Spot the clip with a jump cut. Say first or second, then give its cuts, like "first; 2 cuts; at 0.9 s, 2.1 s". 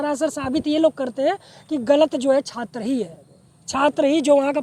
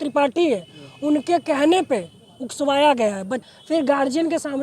second; 1 cut; at 3.4 s